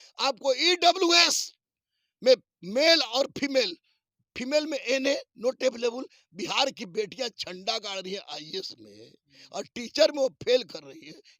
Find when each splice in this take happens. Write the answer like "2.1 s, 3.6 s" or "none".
none